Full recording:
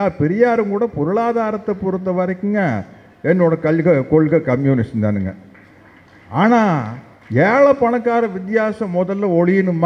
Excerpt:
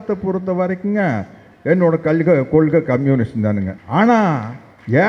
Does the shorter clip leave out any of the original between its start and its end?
yes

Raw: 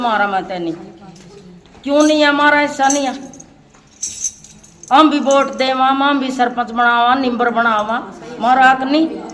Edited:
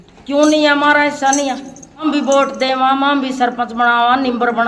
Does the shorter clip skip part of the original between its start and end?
yes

